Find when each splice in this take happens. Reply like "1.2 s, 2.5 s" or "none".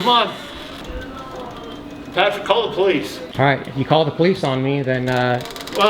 0.8 s, 3.2 s

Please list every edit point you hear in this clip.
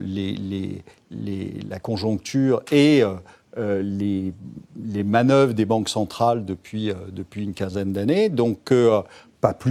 none

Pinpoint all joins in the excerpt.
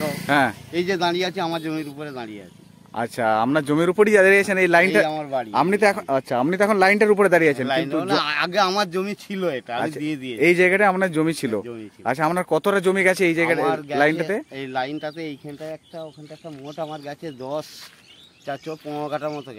none

